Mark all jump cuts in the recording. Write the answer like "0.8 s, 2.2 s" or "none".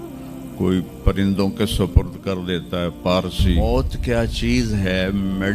3.6 s